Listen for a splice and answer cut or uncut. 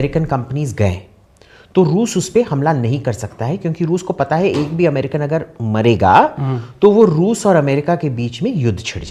uncut